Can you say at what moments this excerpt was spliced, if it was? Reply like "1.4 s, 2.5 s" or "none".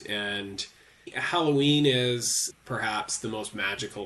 1.2 s, 2.5 s